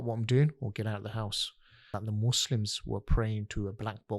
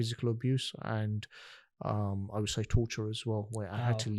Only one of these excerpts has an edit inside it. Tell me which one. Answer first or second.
first